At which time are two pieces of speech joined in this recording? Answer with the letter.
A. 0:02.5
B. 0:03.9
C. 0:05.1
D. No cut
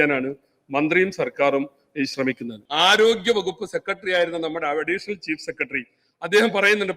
A